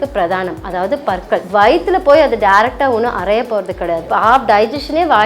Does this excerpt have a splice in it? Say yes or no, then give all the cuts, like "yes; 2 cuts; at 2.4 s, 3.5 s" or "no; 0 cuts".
yes; 2 cuts; at 1.5 s, 4.1 s